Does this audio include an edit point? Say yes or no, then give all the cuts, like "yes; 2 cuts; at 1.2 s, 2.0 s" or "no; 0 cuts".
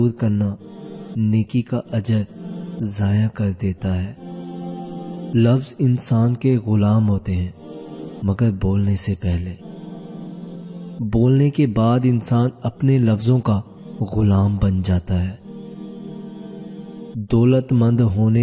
yes; 2 cuts; at 9.6 s, 10.9 s